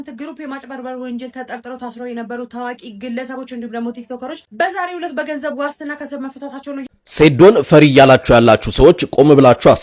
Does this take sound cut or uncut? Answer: cut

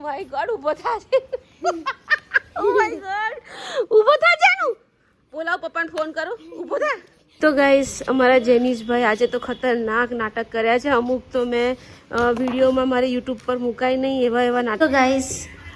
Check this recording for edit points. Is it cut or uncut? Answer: cut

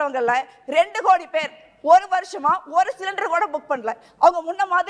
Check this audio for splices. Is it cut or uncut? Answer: uncut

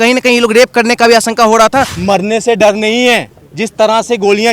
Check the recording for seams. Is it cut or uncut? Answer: cut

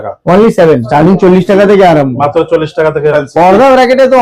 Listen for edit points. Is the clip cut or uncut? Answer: cut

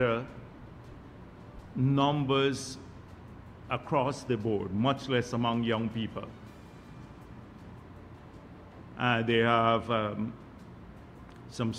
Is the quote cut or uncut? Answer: uncut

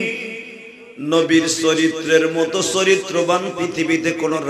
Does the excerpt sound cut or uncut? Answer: uncut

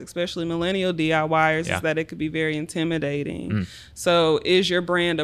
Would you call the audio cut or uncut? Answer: uncut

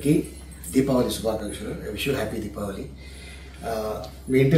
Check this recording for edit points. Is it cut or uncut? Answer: uncut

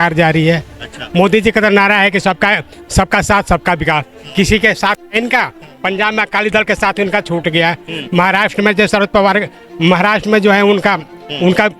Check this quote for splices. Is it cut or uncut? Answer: uncut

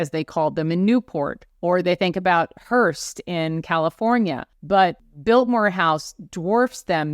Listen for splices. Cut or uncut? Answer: cut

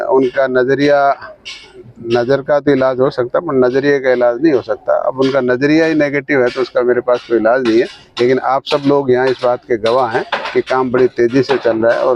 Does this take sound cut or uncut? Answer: uncut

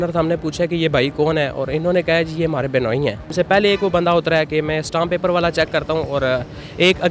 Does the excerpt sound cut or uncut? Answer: cut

